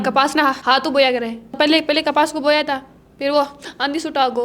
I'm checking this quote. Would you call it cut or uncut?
uncut